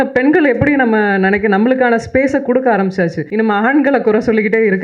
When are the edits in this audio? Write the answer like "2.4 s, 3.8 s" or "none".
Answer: 3.2 s